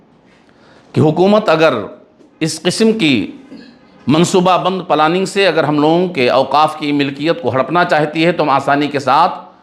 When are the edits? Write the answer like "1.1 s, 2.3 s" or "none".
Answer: none